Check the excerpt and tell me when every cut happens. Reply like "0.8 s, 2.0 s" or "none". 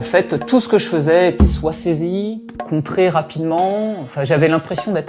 none